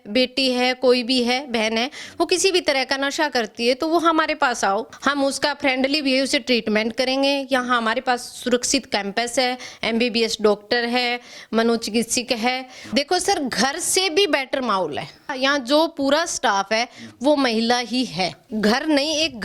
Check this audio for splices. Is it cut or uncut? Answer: cut